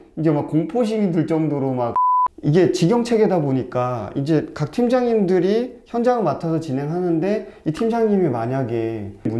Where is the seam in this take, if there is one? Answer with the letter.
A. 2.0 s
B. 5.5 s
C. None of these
A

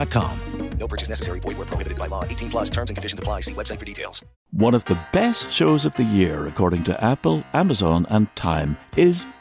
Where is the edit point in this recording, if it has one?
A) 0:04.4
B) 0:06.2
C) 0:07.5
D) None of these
A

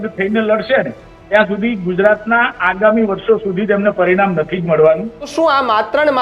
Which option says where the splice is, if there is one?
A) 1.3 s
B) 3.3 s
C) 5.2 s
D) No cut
C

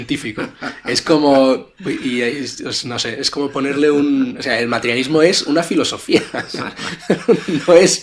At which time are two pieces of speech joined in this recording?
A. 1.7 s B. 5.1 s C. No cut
C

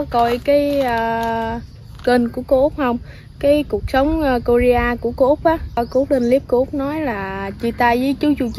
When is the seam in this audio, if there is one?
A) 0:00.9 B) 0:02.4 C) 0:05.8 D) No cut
C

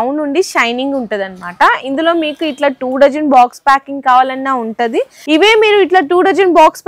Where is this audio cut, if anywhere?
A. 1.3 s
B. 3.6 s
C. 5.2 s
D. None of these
C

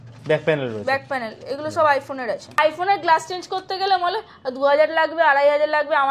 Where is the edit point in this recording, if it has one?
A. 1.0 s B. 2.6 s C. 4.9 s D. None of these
B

